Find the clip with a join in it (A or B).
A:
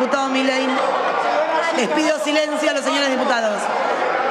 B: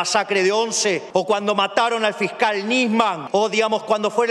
B